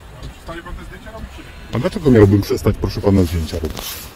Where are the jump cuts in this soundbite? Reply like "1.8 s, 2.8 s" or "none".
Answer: none